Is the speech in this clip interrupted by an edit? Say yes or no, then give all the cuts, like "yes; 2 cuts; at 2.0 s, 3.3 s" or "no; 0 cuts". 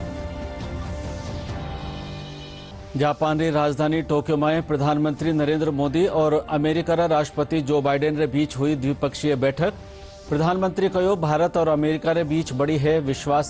yes; 2 cuts; at 1.4 s, 2.8 s